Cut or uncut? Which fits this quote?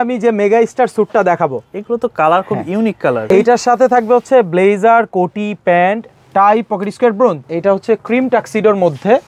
cut